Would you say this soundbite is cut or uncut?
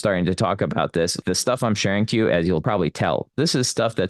cut